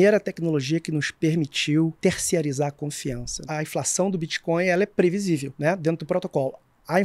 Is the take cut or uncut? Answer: cut